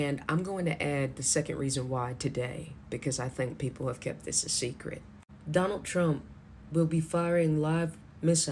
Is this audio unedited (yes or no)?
yes